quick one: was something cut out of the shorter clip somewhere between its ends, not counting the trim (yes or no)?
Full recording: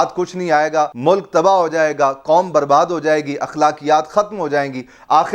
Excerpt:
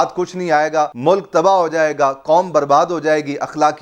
no